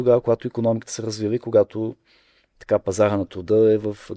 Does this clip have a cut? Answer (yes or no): no